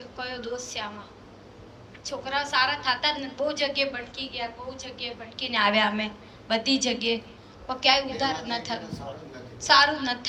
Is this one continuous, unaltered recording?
yes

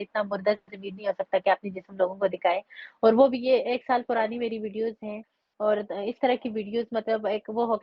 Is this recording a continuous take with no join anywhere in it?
yes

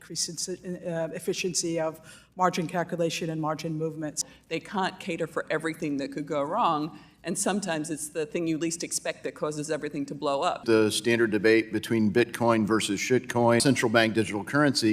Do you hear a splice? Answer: yes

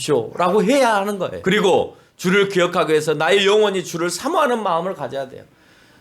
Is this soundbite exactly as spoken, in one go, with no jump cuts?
no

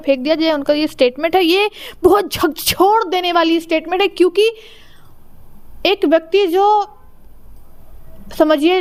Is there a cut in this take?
no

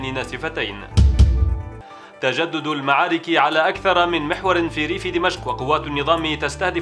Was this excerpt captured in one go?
yes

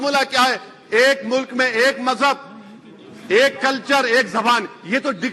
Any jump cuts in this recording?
no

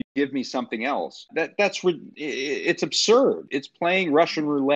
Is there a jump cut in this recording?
yes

